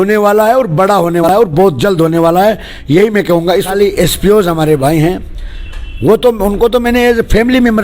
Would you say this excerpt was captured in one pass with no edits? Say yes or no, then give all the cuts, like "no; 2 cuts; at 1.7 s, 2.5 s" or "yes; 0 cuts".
no; 2 cuts; at 1.3 s, 3.7 s